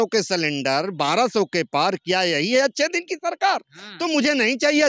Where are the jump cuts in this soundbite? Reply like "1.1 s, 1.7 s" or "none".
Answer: none